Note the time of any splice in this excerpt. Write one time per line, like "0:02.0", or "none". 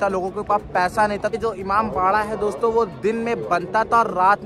0:01.4